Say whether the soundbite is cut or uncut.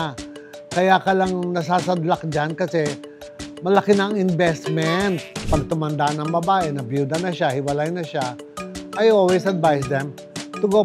cut